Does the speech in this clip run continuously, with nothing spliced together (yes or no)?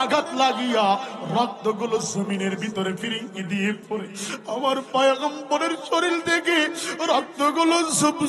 yes